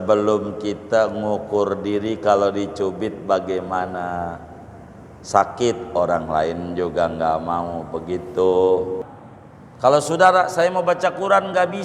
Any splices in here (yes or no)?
yes